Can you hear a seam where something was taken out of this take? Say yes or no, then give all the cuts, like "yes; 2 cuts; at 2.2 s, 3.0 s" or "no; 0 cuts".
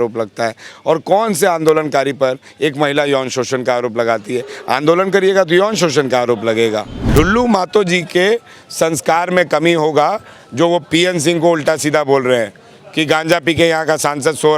yes; 1 cut; at 7.0 s